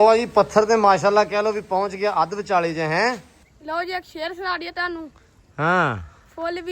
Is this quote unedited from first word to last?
no; 1 cut; at 3.8 s

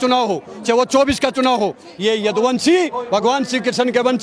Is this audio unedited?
yes; 0 cuts

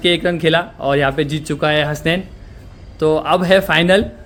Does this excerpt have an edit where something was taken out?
no; 0 cuts

